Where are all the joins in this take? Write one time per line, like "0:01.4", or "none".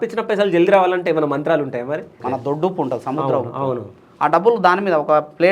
0:02.2